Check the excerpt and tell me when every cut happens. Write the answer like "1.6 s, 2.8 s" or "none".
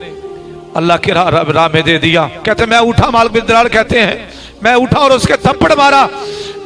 2.4 s